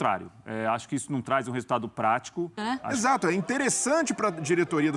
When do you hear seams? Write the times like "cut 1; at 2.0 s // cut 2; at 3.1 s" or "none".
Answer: cut 1; at 2.9 s